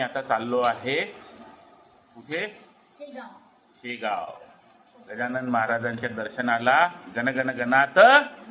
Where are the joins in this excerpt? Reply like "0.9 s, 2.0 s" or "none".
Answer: none